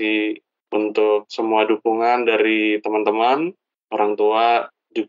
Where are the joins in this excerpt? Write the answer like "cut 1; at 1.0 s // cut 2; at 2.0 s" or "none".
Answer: none